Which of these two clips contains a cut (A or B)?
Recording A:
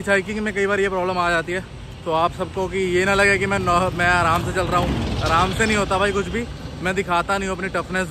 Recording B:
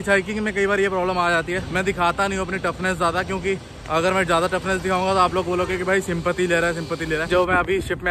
B